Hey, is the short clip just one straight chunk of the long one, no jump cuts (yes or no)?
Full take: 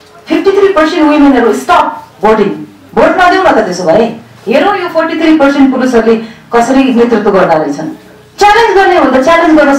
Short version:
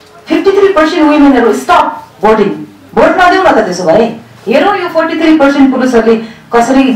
yes